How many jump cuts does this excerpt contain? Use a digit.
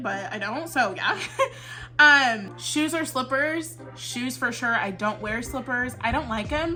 0